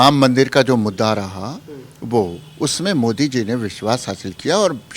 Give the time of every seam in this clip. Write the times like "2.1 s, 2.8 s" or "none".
none